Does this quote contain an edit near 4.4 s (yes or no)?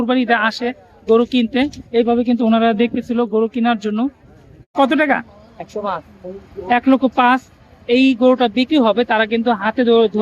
yes